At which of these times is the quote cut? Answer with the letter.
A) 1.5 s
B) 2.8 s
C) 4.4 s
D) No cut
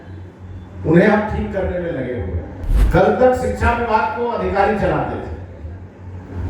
B